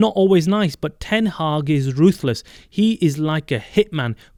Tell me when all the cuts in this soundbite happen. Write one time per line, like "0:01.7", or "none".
none